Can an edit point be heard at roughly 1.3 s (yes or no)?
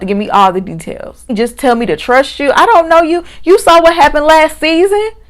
yes